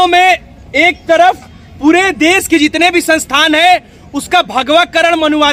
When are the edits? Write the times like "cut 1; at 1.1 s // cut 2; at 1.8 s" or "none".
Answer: none